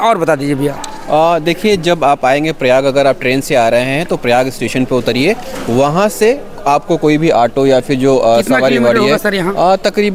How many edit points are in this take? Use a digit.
0